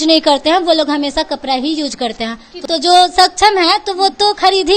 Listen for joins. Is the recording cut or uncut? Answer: cut